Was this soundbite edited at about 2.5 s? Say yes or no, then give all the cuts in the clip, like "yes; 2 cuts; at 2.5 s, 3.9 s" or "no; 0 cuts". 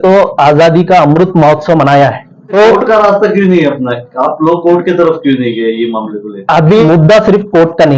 yes; 2 cuts; at 2.5 s, 6.8 s